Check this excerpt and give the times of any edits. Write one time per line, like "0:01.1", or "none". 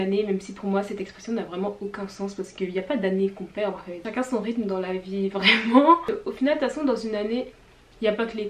0:03.9
0:06.1